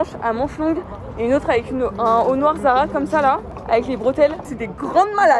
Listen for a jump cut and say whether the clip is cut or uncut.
cut